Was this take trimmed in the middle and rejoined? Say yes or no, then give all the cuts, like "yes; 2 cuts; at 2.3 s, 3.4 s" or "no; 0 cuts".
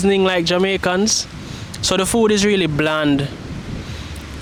no; 0 cuts